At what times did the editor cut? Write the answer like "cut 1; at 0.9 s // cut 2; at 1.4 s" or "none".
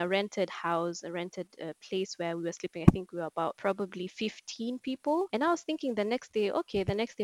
cut 1; at 5.3 s